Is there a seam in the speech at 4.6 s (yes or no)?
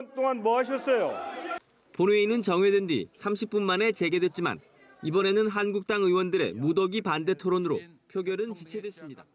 no